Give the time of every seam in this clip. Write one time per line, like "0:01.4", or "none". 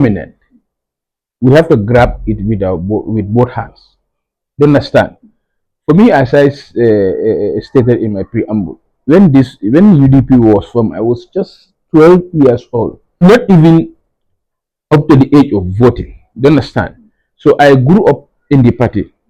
0:13.2